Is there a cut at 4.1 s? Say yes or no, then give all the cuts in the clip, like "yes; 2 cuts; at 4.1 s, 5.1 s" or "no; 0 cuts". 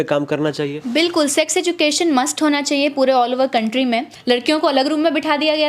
yes; 1 cut; at 4.1 s